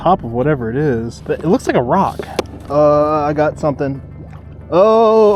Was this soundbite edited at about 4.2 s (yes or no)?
no